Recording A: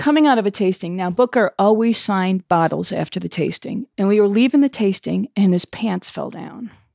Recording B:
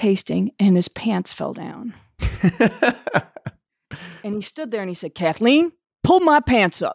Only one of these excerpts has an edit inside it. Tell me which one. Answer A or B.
A